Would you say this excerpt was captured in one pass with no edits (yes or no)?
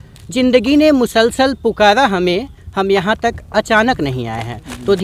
yes